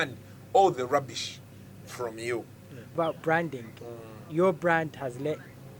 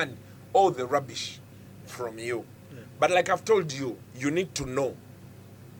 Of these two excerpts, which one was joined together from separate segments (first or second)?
first